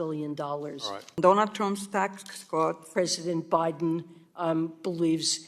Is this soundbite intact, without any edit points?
no; 2 cuts; at 1.2 s, 2.9 s

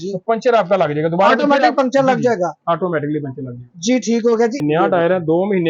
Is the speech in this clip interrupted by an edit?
yes; 1 cut; at 4.6 s

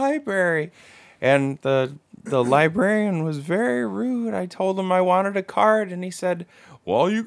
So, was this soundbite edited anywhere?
no; 0 cuts

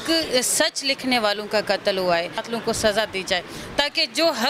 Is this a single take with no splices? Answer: no; 1 cut; at 2.4 s

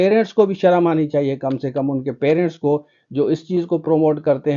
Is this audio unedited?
yes; 0 cuts

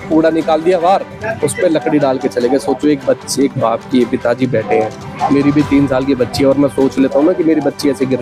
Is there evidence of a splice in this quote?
no; 0 cuts

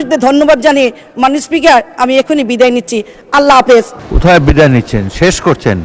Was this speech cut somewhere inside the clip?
yes; 1 cut; at 4.0 s

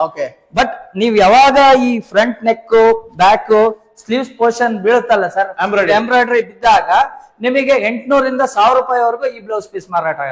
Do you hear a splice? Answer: no; 0 cuts

